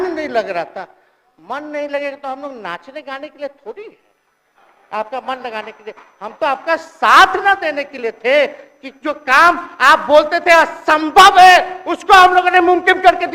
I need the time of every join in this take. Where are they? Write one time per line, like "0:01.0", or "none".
none